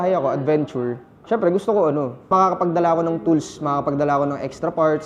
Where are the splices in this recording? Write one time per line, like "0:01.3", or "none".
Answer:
0:01.1
0:02.2